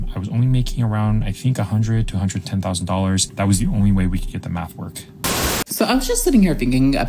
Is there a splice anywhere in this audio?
yes; 2 cuts; at 3.3 s, 5.4 s

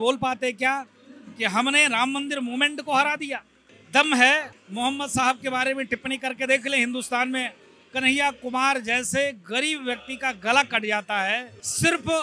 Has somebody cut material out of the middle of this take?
no; 0 cuts

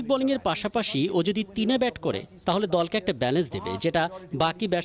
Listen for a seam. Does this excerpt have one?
no; 0 cuts

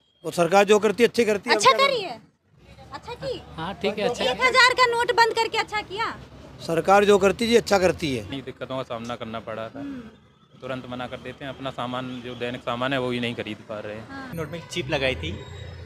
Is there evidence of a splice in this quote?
yes; 2 cuts; at 8.3 s, 14.3 s

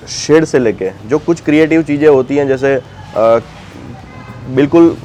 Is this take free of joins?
yes; 0 cuts

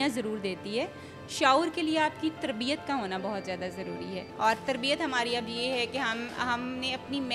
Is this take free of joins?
no; 1 cut; at 4.3 s

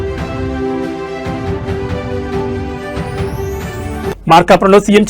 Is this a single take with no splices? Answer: yes; 0 cuts

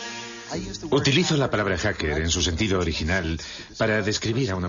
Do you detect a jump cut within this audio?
yes; 1 cut; at 2.2 s

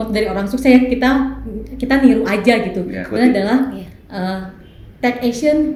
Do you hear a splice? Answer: no; 0 cuts

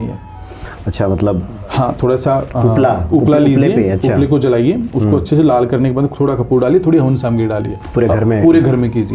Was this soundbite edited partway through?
no; 0 cuts

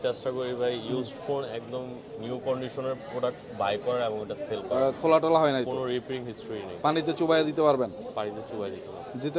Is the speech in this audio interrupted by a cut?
yes; 1 cut; at 4.7 s

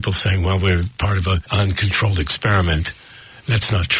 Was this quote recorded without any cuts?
no; 1 cut; at 1.5 s

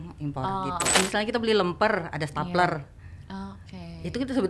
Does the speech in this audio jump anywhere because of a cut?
yes; 1 cut; at 1.0 s

